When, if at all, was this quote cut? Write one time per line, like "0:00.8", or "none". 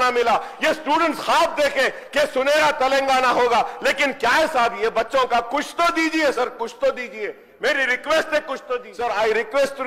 0:08.9